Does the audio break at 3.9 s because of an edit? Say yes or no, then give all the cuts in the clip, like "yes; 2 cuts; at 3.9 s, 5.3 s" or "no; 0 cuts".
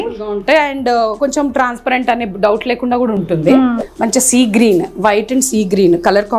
yes; 1 cut; at 3.9 s